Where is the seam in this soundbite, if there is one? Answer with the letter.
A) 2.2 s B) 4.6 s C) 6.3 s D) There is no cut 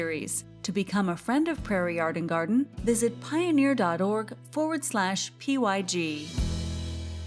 C